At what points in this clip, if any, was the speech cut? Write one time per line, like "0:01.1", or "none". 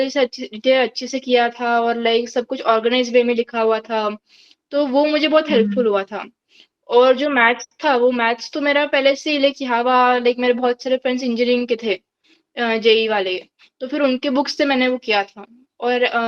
none